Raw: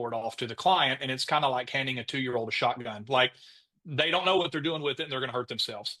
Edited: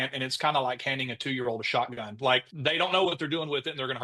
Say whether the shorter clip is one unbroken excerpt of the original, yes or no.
no